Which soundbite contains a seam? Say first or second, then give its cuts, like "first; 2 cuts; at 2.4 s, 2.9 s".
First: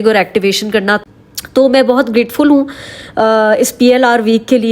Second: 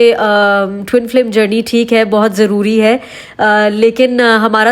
first; 1 cut; at 1.0 s